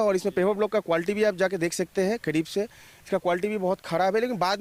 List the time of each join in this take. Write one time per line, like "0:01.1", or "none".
none